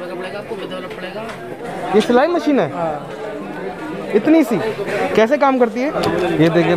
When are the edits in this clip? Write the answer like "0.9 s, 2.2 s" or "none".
1.6 s, 4.6 s, 5.9 s